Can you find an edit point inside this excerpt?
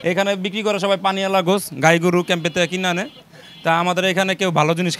no; 0 cuts

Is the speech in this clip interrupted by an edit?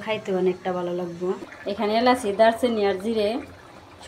yes; 1 cut; at 1.4 s

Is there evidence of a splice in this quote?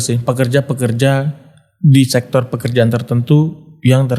no; 0 cuts

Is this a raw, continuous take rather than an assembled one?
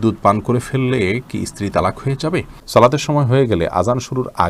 no; 1 cut; at 2.5 s

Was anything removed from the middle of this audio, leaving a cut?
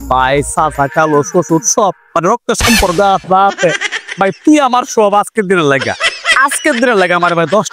no; 0 cuts

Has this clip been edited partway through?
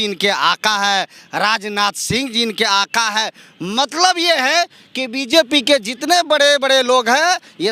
no; 0 cuts

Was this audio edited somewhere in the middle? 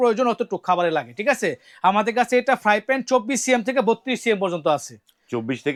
no; 0 cuts

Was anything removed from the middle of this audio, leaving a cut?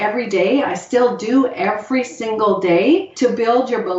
yes; 1 cut; at 3.1 s

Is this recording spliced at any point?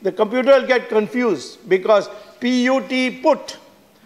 no; 0 cuts

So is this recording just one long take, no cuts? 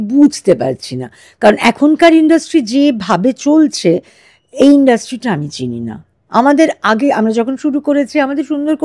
yes; 0 cuts

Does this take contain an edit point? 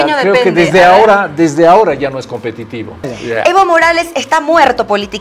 yes; 1 cut; at 3.1 s

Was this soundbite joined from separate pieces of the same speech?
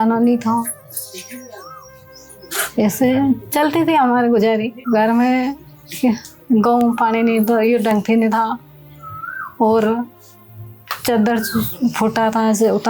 yes; 1 cut; at 4.7 s

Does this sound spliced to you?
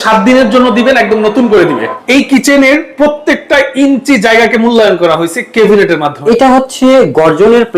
yes; 2 cuts; at 1.9 s, 6.1 s

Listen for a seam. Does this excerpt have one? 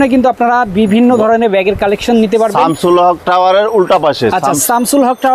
no; 0 cuts

